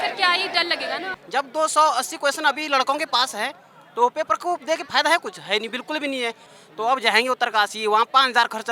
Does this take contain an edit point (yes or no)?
yes